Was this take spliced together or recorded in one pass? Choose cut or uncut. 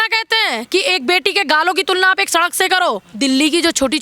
cut